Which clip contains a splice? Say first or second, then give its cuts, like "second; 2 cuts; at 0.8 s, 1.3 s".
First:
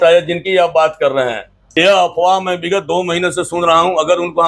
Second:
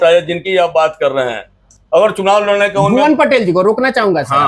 first; 1 cut; at 1.6 s